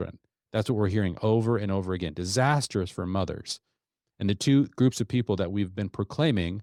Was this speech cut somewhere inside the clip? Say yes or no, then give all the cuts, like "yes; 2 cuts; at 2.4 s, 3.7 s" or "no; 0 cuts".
no; 0 cuts